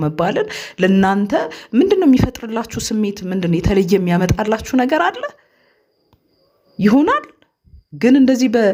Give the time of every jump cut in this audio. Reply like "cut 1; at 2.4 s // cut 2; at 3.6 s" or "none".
none